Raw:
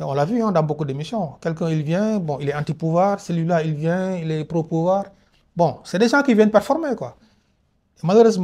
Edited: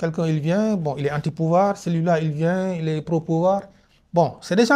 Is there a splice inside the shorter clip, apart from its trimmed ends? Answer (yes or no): no